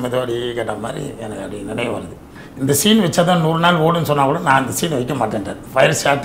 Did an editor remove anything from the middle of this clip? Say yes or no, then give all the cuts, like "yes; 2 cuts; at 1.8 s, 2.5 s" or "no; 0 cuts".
yes; 1 cut; at 2.4 s